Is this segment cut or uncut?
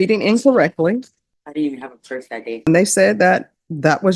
cut